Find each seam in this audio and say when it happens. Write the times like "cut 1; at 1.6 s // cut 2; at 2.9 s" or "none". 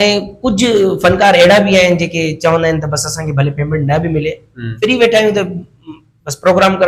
none